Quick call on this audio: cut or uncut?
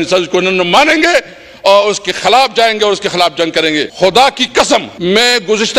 cut